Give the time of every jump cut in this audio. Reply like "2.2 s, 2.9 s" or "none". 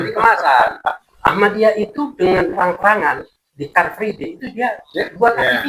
1.1 s